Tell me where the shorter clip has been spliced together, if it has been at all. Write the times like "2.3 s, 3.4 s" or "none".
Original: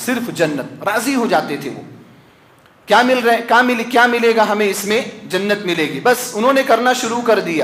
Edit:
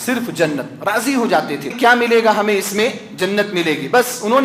1.7 s